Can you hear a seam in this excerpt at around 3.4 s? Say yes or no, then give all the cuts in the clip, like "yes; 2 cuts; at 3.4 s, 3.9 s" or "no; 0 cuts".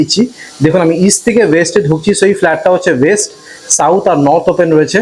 no; 0 cuts